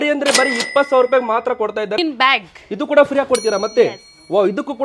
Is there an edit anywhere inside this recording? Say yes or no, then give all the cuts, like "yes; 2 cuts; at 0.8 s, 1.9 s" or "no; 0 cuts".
yes; 1 cut; at 2.0 s